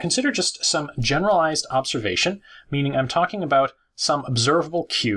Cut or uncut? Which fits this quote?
cut